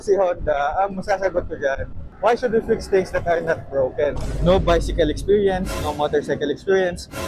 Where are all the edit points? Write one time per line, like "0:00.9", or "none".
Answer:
0:04.2